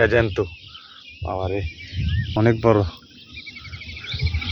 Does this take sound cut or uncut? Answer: cut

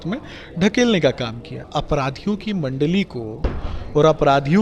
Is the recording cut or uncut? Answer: cut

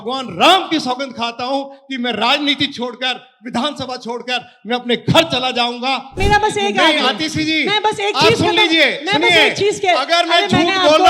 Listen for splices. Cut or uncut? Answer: cut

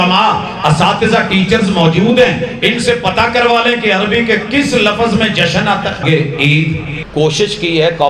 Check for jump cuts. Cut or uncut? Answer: cut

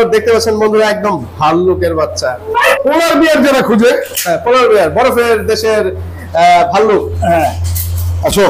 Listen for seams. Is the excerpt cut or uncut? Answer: cut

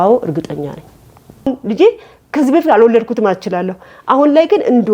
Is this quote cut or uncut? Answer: cut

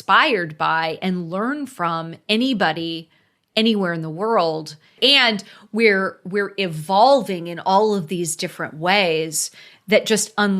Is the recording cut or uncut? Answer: cut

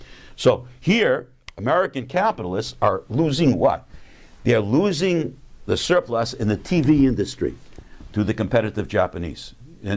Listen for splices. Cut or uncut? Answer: cut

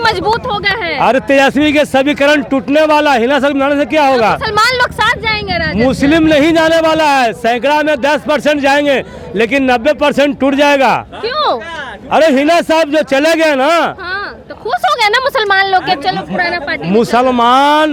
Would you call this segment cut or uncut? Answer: uncut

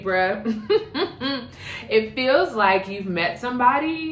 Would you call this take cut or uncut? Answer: uncut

